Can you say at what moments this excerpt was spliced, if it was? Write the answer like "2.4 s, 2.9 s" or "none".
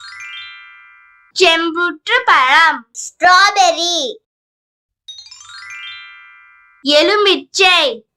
1.2 s